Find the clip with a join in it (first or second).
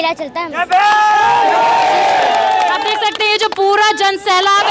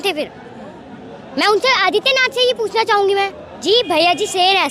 second